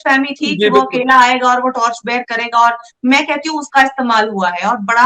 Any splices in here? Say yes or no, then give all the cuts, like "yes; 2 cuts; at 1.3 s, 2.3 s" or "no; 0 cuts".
no; 0 cuts